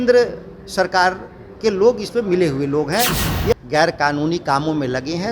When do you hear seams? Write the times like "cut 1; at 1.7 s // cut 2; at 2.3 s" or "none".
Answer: cut 1; at 3.5 s